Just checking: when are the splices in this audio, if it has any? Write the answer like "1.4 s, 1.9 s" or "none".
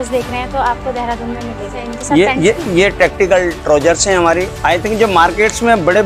1.9 s, 4.5 s